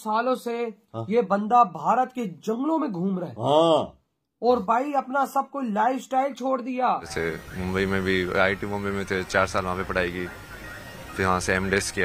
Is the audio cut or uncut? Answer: cut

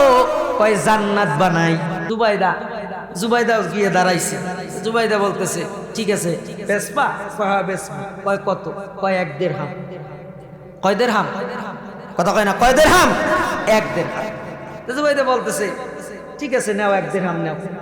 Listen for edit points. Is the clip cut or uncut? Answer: cut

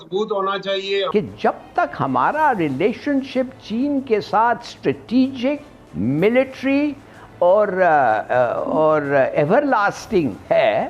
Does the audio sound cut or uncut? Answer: cut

